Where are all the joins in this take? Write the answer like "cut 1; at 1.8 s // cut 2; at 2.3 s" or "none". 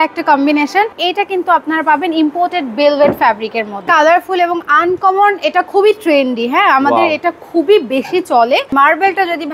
cut 1; at 0.9 s // cut 2; at 3.9 s // cut 3; at 8.7 s